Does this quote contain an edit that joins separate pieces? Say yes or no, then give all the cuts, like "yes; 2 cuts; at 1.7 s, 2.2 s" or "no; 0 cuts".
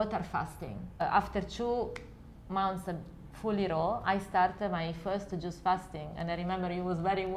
yes; 1 cut; at 0.9 s